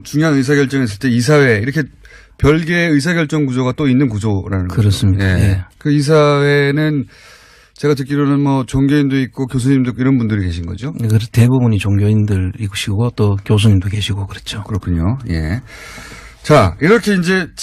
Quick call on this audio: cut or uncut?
uncut